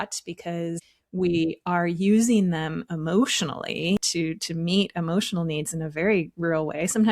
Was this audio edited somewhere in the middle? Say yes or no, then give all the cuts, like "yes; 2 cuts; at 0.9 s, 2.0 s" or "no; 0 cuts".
yes; 2 cuts; at 1.0 s, 4.1 s